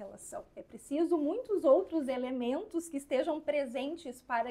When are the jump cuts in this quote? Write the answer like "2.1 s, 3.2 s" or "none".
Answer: none